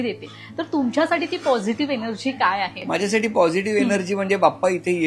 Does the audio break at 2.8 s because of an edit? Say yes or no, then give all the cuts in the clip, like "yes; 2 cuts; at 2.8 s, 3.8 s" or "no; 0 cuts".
yes; 1 cut; at 2.8 s